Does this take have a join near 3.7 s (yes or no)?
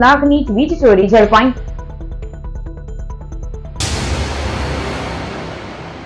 yes